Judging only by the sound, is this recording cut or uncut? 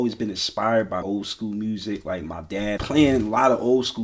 cut